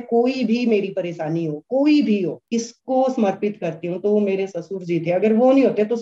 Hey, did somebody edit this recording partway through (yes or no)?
yes